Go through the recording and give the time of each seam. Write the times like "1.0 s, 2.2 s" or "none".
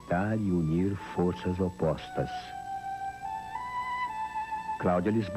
1.4 s